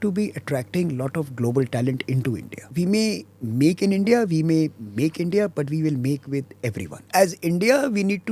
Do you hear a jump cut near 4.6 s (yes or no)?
no